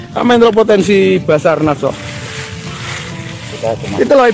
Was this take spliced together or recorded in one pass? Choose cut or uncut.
uncut